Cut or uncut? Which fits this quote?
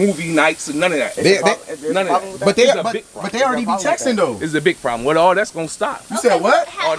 uncut